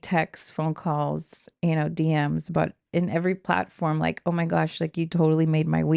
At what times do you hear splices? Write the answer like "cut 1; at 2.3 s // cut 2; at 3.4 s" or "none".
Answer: none